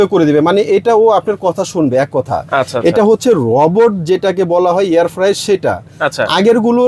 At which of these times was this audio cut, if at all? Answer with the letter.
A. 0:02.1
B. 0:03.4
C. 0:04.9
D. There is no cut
D